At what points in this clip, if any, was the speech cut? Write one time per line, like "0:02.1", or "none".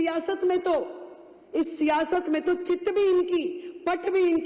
none